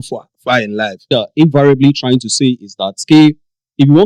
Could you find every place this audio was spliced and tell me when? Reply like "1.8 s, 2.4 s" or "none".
1.0 s